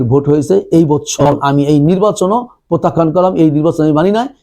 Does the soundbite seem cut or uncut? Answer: cut